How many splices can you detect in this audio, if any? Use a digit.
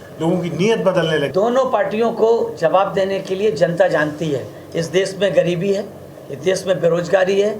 1